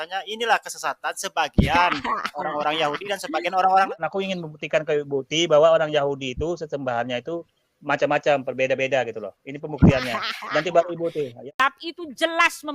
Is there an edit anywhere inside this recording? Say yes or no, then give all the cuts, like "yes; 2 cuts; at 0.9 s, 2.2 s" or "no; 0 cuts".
yes; 2 cuts; at 3.9 s, 11.4 s